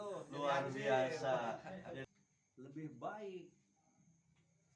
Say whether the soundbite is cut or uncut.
cut